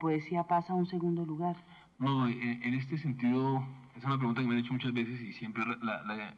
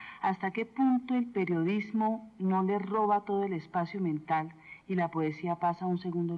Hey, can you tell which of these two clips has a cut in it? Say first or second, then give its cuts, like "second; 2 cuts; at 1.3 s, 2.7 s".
second; 1 cut; at 4.2 s